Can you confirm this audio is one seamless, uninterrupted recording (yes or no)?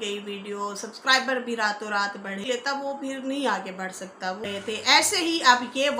no